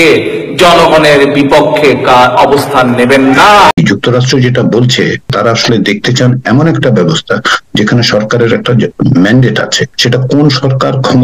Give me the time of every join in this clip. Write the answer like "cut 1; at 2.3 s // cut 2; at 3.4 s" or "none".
cut 1; at 3.7 s